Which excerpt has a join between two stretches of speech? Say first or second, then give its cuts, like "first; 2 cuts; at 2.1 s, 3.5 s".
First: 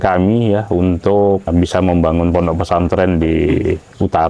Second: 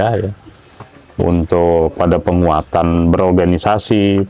first; 1 cut; at 1.5 s